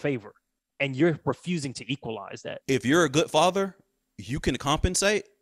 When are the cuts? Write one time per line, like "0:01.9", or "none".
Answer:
0:02.6